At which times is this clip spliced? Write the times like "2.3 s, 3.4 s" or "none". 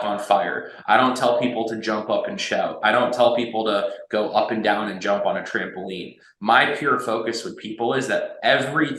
none